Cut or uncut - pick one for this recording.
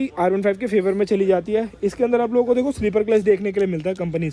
uncut